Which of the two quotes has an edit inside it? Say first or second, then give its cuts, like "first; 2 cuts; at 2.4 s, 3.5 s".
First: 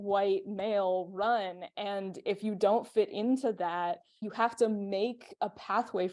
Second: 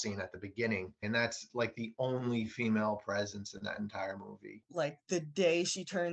second; 2 cuts; at 1.0 s, 4.5 s